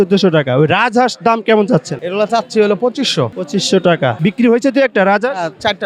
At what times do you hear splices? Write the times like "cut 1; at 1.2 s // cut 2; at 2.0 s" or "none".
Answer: cut 1; at 2.0 s // cut 2; at 3.4 s // cut 3; at 4.2 s